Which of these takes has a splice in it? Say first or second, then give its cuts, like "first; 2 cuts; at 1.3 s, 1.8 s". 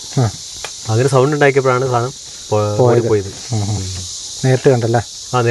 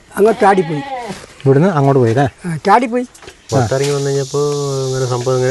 second; 1 cut; at 3.3 s